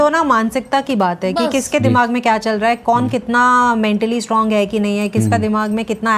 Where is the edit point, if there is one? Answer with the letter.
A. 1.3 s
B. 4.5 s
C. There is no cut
C